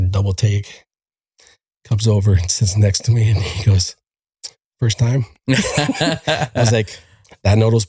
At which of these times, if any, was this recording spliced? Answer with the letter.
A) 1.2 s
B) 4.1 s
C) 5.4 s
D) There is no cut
D